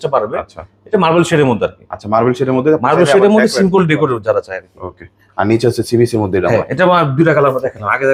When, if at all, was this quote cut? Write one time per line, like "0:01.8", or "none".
none